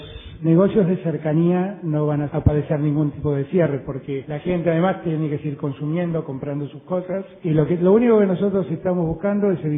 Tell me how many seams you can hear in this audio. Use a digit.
1